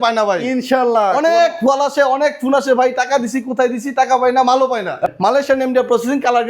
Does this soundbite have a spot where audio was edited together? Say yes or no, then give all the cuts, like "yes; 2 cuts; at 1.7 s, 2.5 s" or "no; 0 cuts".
yes; 1 cut; at 5.1 s